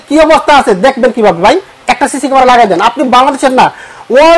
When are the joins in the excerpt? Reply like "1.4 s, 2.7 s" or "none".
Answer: none